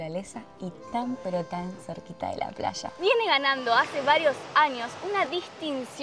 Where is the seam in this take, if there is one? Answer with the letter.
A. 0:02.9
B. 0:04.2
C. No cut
A